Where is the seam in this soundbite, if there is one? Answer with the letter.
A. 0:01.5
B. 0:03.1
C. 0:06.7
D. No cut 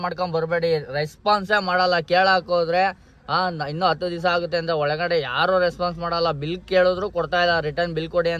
D